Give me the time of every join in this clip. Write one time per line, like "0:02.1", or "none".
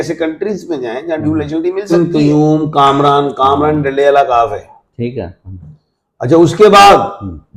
0:01.9